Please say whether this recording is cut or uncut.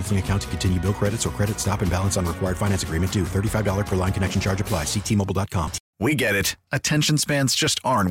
cut